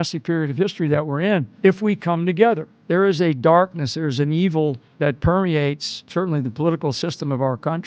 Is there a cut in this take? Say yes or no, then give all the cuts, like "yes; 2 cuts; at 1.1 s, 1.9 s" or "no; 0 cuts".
yes; 4 cuts; at 1.6 s, 2.8 s, 4.9 s, 6.1 s